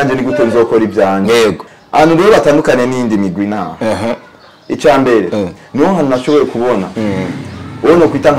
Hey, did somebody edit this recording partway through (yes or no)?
yes